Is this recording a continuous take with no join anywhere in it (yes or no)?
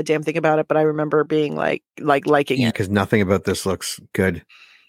no